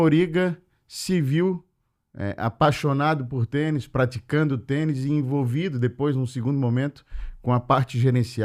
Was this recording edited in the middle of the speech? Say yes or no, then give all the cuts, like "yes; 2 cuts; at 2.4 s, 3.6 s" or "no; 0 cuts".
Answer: no; 0 cuts